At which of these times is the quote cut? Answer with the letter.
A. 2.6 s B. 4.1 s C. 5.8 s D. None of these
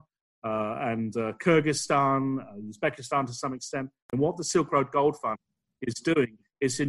B